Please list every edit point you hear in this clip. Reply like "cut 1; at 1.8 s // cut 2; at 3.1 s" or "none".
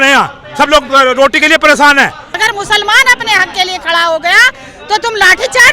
cut 1; at 2.3 s